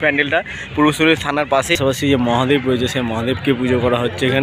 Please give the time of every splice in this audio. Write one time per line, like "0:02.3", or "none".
0:01.8

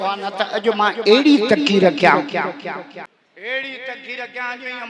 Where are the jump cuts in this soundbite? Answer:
0:03.0

